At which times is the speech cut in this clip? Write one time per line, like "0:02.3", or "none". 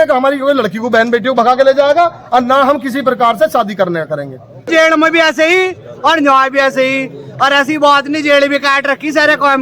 0:04.7